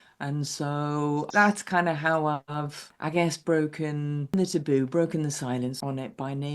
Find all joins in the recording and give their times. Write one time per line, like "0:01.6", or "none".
0:01.3
0:04.3